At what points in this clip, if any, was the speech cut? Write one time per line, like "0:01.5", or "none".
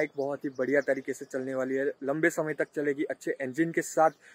none